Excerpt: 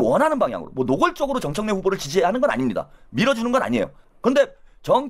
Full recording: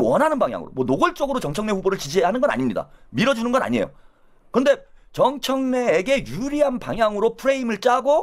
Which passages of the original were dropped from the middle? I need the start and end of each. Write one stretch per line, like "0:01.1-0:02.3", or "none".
0:04.0-0:04.3